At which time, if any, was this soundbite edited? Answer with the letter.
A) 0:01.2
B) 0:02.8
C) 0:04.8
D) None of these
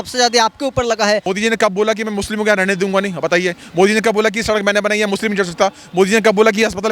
A